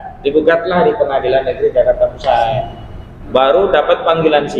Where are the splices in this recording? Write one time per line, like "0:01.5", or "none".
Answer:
none